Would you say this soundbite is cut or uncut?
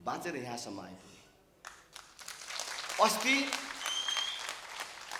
uncut